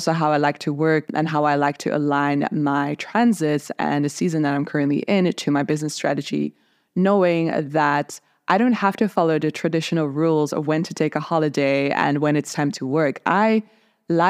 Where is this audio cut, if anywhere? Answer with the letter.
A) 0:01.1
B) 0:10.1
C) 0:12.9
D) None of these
A